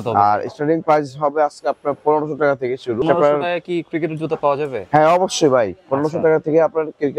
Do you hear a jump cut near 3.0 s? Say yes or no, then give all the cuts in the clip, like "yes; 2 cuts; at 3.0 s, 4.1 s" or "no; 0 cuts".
yes; 1 cut; at 3.0 s